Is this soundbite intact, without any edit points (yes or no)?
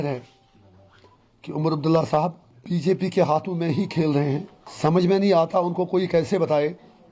no